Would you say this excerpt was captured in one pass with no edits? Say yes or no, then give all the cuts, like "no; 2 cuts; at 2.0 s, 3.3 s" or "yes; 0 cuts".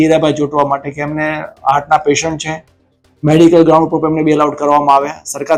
yes; 0 cuts